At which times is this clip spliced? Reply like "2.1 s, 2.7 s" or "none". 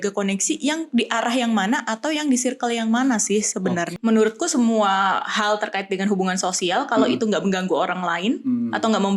3.9 s